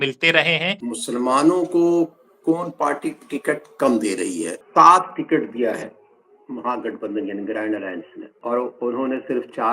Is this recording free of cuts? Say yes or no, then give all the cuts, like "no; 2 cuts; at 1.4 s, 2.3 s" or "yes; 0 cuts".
no; 3 cuts; at 0.8 s, 4.6 s, 8.2 s